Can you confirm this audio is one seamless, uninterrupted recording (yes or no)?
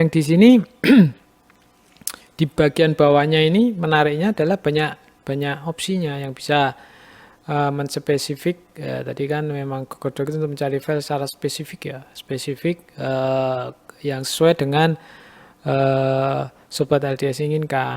yes